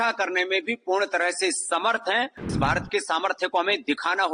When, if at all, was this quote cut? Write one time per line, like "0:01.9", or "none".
0:02.5